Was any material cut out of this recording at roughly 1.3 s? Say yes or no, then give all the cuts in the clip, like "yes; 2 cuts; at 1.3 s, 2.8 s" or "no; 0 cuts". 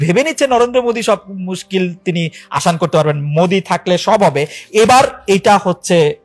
no; 0 cuts